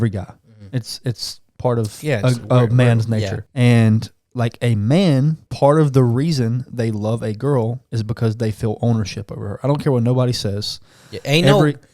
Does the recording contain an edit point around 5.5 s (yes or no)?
yes